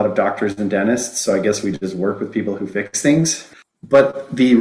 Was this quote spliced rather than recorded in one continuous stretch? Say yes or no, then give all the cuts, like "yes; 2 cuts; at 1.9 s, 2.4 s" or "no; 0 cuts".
yes; 1 cut; at 3.4 s